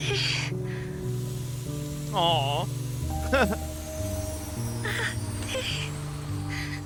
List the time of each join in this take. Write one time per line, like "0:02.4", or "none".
none